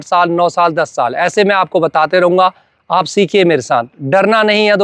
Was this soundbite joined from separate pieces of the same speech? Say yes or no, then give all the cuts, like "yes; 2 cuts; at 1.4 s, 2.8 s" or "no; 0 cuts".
no; 0 cuts